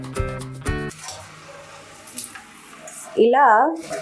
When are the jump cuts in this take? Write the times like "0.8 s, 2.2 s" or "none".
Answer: 1.0 s